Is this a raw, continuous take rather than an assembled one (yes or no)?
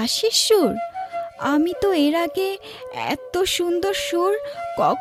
yes